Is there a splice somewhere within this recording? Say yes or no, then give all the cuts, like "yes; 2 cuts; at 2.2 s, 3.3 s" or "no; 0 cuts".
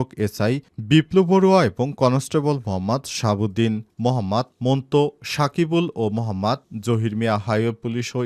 no; 0 cuts